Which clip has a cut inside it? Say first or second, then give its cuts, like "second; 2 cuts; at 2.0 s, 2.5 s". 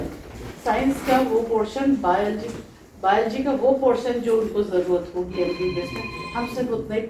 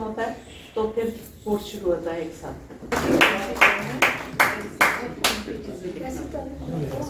second; 1 cut; at 2.9 s